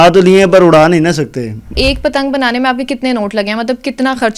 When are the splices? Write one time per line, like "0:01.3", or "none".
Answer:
0:01.7